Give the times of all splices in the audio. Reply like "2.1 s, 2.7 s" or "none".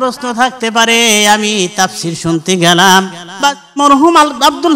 3.8 s

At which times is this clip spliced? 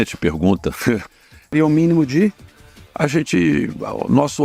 1.5 s

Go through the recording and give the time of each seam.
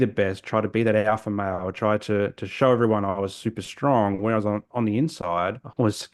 none

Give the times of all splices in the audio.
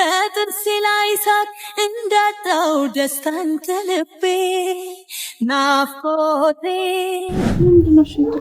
7.5 s

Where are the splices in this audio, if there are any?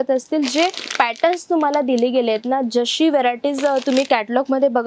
none

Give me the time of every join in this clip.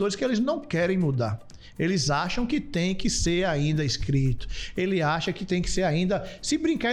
none

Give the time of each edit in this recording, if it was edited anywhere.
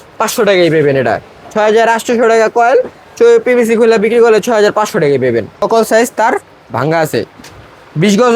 5.6 s

